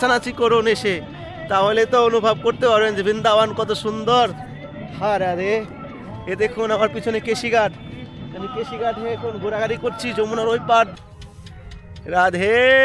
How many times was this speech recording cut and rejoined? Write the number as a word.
one